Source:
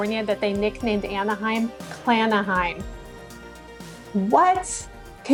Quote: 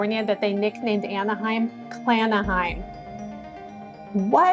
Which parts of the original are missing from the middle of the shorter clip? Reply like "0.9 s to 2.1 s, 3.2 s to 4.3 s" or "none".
none